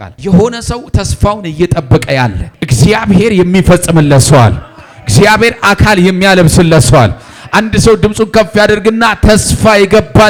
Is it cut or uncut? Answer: uncut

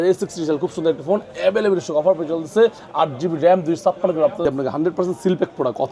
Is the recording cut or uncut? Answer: cut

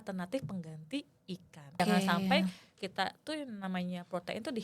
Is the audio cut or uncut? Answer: cut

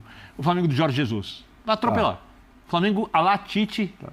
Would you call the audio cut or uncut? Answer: uncut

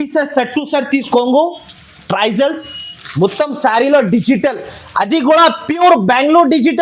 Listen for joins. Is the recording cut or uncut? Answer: cut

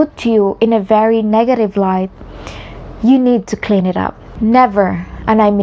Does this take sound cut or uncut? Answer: cut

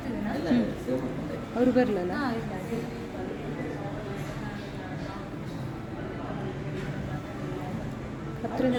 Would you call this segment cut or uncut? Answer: uncut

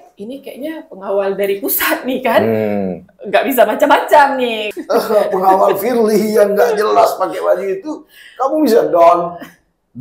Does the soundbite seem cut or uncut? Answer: cut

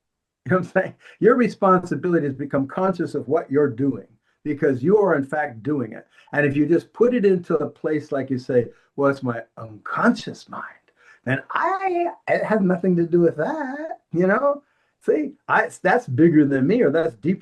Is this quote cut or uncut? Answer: uncut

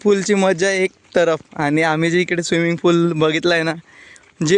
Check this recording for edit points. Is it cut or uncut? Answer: uncut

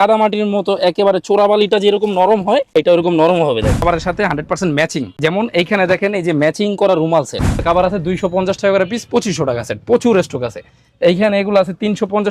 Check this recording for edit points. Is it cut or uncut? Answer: cut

